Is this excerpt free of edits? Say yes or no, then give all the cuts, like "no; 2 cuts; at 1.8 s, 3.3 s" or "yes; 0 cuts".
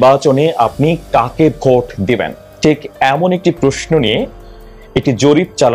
yes; 0 cuts